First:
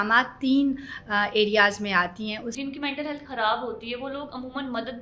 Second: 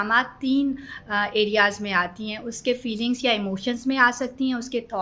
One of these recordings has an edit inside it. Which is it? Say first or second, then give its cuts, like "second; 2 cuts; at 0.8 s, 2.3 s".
first; 1 cut; at 2.5 s